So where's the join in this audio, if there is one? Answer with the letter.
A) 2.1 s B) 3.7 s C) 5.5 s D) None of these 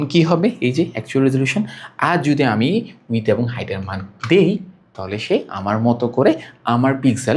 D